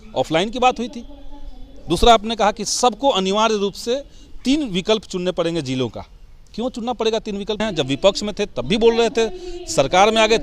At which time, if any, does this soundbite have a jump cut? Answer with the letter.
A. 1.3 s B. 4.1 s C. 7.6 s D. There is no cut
C